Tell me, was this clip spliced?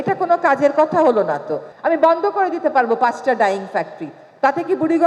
yes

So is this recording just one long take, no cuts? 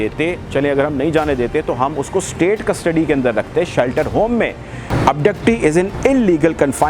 no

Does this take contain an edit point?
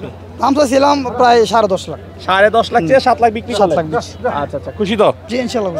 no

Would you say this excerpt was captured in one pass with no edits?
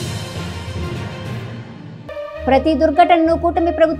yes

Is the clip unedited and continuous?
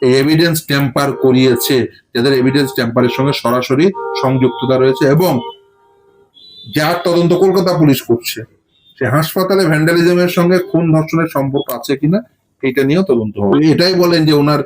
no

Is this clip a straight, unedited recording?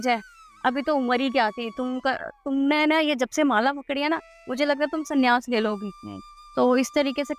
yes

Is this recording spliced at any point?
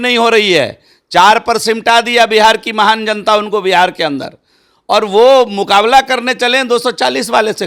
no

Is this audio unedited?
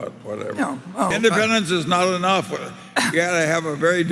no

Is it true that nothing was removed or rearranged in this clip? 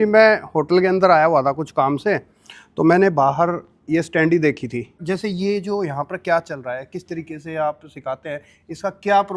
no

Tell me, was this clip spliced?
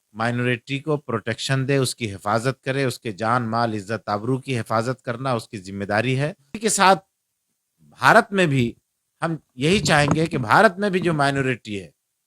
yes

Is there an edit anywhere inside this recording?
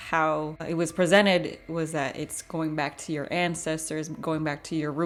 no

